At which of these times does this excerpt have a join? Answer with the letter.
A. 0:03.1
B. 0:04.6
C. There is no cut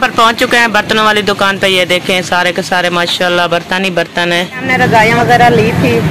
B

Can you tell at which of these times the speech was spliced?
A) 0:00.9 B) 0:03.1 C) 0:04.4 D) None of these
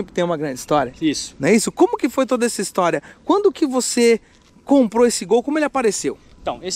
D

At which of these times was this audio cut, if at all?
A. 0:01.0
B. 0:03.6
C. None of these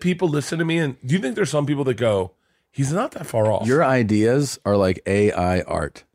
B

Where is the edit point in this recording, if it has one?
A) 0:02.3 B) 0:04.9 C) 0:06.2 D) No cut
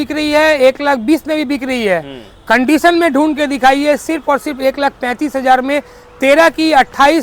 D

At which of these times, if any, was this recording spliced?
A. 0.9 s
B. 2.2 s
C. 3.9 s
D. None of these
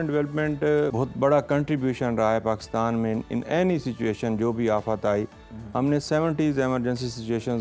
A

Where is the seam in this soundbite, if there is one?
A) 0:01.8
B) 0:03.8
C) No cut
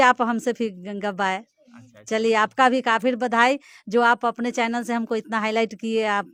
C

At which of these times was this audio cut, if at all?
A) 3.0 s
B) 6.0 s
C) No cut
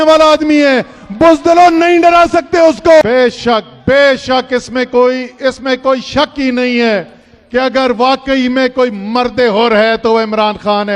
A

